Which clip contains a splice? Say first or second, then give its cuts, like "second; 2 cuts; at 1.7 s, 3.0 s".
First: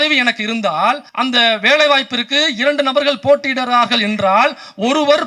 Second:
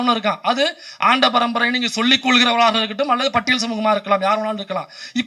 first; 1 cut; at 1.1 s